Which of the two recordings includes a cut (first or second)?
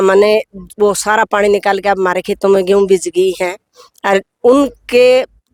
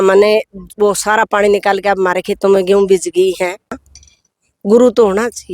second